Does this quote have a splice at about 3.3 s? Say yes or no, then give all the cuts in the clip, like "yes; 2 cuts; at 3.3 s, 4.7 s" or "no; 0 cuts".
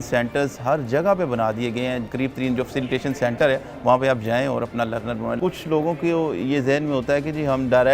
no; 2 cuts; at 2.0 s, 5.4 s